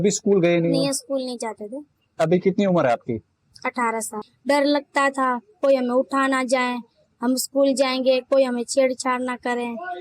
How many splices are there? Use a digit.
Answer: 1